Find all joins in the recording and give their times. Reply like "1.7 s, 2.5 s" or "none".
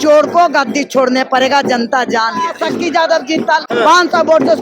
2.6 s, 3.7 s